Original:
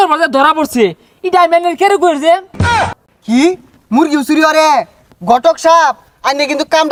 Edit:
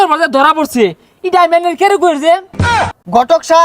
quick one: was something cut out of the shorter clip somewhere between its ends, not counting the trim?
yes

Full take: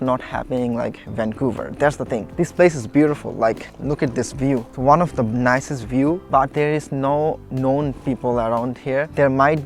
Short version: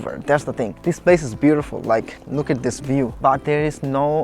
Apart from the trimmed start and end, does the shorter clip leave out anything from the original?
yes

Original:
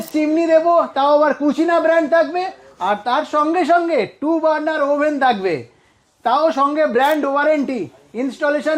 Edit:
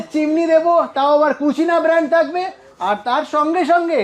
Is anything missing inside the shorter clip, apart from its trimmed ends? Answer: no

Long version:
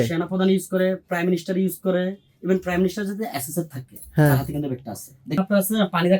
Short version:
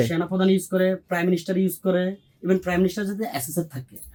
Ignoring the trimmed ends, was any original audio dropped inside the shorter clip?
no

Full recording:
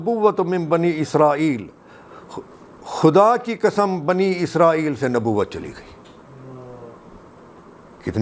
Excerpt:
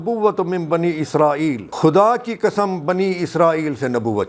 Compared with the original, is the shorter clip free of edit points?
no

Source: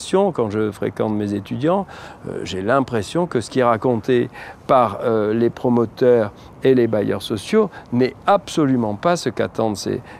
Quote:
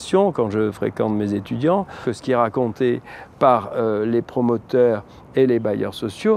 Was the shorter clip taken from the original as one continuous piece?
no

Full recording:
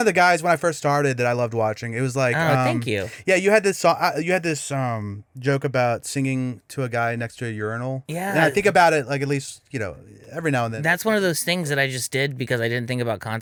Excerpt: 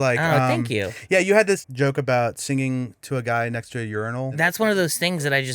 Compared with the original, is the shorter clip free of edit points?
no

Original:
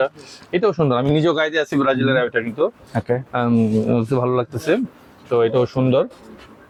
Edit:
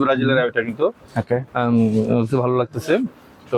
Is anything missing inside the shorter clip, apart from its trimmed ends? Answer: no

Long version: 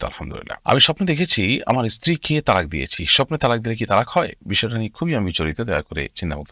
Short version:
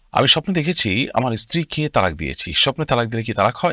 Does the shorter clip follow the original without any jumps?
yes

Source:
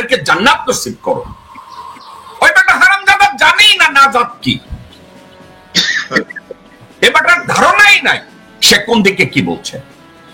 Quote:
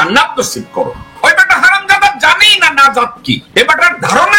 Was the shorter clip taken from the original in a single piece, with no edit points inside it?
no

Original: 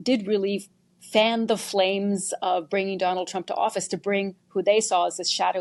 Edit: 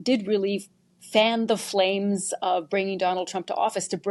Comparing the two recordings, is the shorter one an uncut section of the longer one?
yes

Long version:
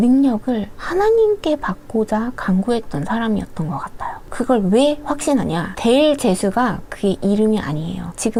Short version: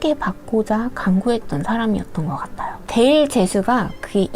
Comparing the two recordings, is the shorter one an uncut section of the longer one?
no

